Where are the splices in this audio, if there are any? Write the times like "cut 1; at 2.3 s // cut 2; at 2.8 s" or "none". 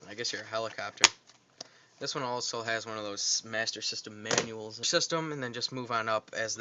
none